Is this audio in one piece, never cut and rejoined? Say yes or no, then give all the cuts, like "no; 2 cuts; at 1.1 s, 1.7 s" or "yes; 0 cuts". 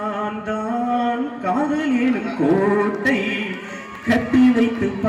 yes; 0 cuts